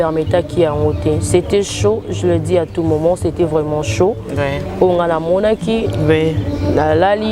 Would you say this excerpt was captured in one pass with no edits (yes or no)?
yes